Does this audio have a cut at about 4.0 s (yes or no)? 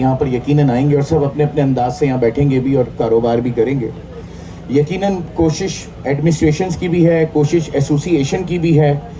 no